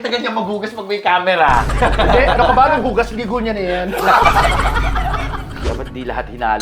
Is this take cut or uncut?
cut